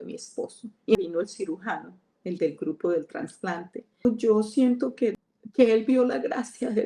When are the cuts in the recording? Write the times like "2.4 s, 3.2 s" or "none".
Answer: 1.0 s, 4.0 s, 5.2 s